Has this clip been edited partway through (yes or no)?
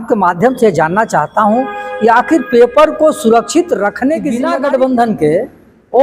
yes